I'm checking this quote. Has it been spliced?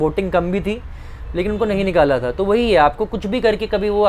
no; 0 cuts

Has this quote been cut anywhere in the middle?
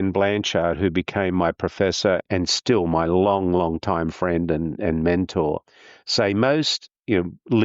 yes; 1 cut; at 2.2 s

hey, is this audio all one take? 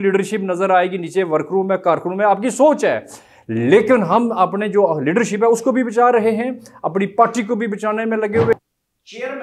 no; 1 cut; at 8.5 s

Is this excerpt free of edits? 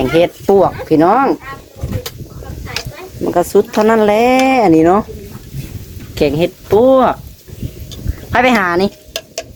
yes; 0 cuts

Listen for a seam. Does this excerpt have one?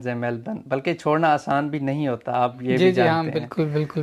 no; 0 cuts

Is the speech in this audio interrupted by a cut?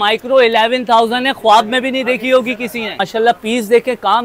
yes; 1 cut; at 3.1 s

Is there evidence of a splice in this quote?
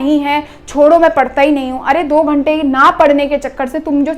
no; 0 cuts

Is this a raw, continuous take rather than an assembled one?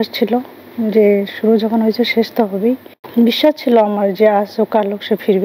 no; 1 cut; at 3.0 s

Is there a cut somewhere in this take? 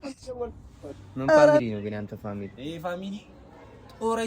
yes; 1 cut; at 1.6 s

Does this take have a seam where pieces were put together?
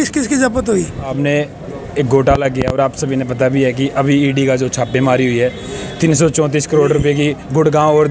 yes; 1 cut; at 1.1 s

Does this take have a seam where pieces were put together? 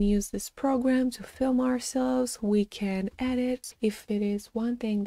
yes; 1 cut; at 3.6 s

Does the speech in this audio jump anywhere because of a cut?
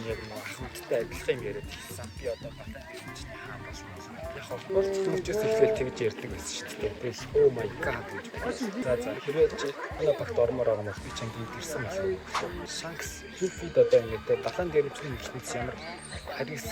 no; 0 cuts

